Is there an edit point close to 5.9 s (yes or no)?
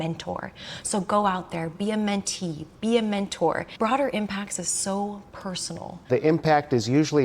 yes